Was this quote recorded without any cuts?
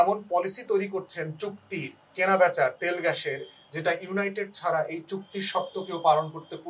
yes; 0 cuts

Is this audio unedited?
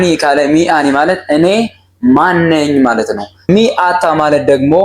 no; 1 cut; at 3.3 s

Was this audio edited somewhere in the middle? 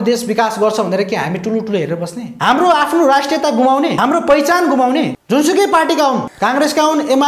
yes; 4 cuts; at 2.2 s, 4.0 s, 5.2 s, 6.3 s

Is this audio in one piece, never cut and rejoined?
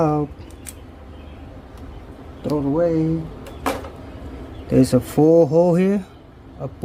yes; 0 cuts

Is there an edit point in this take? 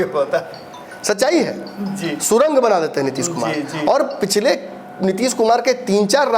no; 0 cuts

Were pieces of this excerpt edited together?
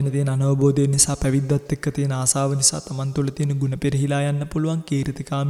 no; 0 cuts

